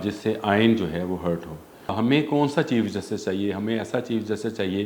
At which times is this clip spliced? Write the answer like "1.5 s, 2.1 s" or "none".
1.9 s